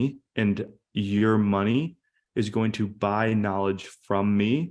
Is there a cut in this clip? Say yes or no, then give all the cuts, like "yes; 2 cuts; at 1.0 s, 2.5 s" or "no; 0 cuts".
no; 0 cuts